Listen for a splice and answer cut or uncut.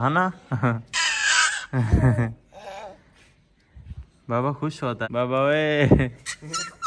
cut